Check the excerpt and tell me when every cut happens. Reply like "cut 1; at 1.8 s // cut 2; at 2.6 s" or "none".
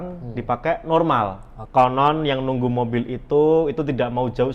cut 1; at 1.5 s